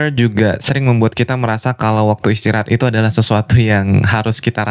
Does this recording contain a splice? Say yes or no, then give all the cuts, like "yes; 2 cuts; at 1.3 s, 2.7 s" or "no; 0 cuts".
no; 0 cuts